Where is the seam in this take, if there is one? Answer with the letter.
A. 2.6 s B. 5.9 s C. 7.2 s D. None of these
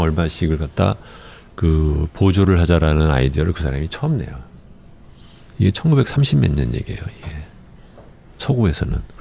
A